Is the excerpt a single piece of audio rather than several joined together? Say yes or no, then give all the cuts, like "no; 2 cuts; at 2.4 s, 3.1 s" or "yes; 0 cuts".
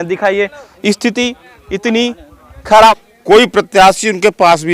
no; 1 cut; at 2.9 s